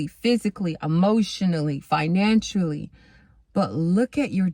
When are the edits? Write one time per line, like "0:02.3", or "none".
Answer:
none